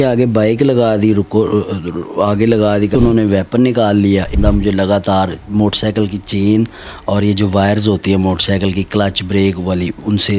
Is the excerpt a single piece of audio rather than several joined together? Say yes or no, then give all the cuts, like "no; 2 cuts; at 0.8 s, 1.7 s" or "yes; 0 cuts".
no; 2 cuts; at 2.9 s, 4.3 s